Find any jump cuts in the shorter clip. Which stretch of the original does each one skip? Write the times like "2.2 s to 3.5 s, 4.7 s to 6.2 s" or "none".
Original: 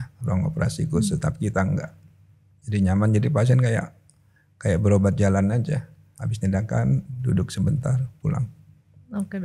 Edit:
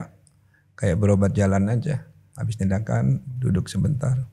none